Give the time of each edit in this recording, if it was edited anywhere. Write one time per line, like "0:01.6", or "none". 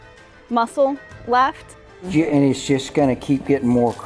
0:02.0